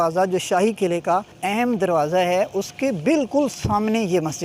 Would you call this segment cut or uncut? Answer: cut